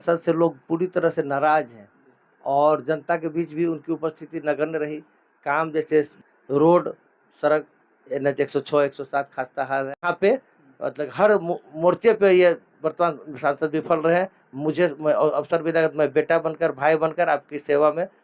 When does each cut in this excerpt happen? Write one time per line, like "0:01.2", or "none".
0:06.2
0:09.9